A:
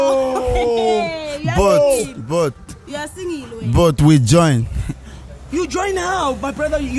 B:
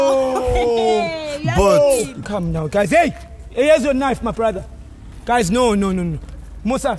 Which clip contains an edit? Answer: B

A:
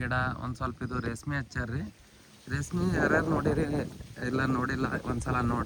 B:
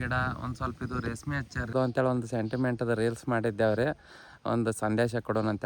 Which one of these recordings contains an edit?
B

